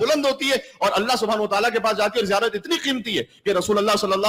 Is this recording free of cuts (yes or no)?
yes